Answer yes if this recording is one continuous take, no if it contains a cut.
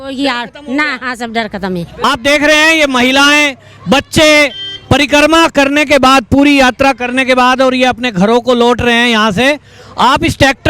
yes